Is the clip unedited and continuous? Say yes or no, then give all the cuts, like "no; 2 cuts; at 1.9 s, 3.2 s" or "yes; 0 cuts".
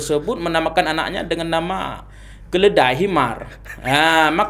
yes; 0 cuts